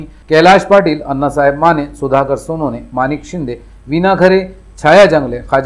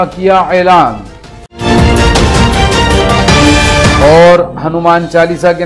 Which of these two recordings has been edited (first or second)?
second